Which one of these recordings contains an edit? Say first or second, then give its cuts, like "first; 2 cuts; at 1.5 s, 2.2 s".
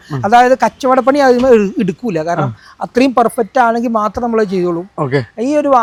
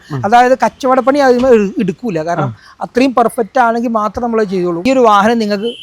second; 1 cut; at 4.8 s